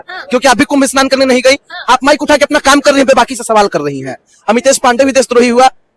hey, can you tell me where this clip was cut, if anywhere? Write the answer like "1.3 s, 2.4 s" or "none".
none